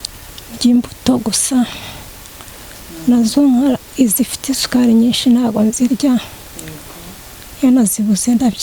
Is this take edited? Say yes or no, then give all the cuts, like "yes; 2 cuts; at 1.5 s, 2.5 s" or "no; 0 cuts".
no; 0 cuts